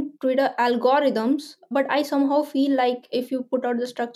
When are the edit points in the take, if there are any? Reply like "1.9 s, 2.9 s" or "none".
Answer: 1.7 s, 3.1 s